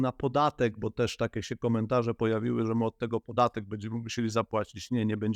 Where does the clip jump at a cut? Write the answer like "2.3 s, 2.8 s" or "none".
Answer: none